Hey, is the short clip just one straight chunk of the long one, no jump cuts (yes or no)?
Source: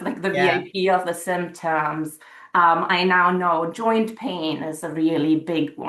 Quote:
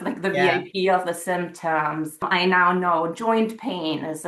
no